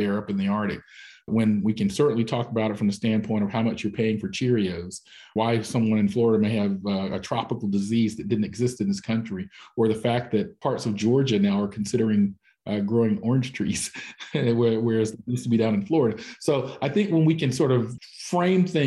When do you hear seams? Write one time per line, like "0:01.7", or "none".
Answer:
0:05.3